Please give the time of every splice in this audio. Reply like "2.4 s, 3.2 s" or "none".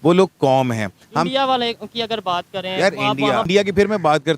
3.5 s